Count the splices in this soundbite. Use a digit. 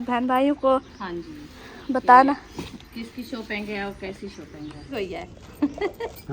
1